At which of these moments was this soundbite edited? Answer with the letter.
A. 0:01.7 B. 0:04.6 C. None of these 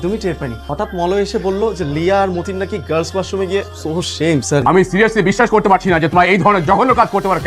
B